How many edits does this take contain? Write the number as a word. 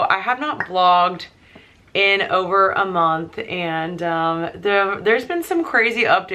zero